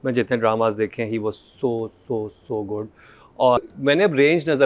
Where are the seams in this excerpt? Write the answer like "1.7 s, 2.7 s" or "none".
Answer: 3.6 s

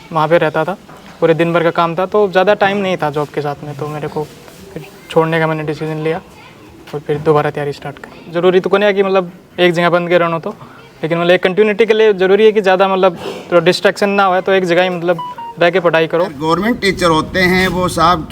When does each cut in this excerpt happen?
8.3 s, 16.4 s

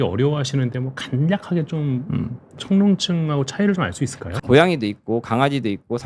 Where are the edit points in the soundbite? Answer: 4.2 s

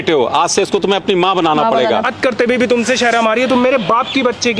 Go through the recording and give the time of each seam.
2.1 s

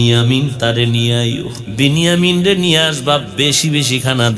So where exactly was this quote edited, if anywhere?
1.6 s

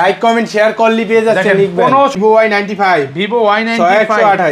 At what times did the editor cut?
2.1 s

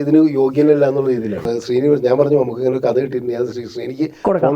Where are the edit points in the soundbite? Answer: 1.6 s

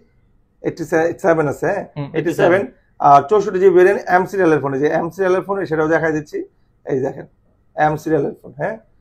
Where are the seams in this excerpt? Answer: none

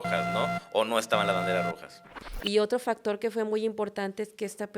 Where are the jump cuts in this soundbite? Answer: 2.0 s

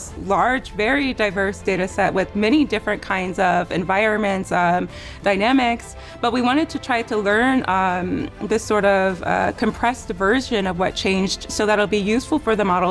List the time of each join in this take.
none

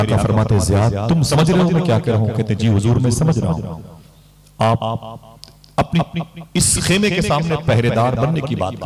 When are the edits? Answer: 1.3 s

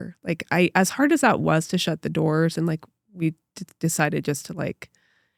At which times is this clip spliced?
none

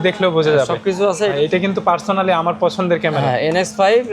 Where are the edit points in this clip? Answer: 1.3 s

